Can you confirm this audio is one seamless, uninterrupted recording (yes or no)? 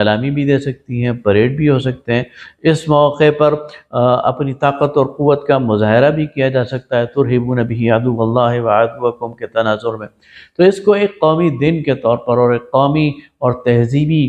yes